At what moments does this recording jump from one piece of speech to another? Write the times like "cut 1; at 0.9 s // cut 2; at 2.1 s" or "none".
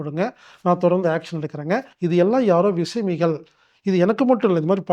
cut 1; at 1.9 s